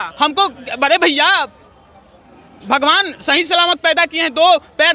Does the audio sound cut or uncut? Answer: uncut